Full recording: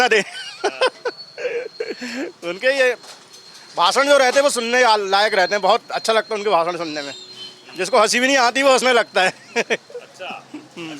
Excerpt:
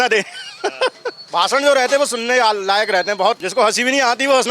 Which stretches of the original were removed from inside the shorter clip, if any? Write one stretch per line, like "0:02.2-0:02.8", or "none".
0:01.1-0:03.6
0:05.9-0:07.8